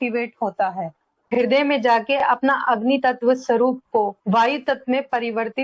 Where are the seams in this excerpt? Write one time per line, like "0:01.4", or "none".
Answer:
0:01.3